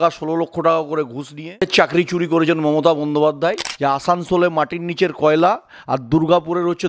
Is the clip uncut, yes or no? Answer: no